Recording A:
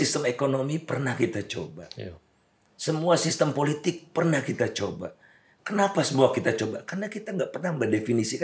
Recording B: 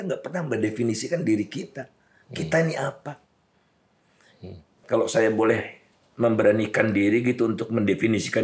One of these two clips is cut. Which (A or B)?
B